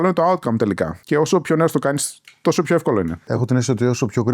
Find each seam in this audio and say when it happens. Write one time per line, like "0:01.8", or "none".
0:00.9
0:03.3